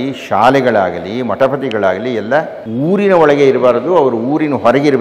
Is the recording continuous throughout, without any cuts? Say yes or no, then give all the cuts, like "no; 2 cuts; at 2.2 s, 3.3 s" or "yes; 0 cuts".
no; 1 cut; at 2.6 s